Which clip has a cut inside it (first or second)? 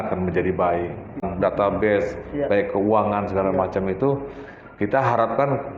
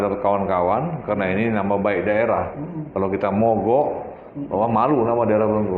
first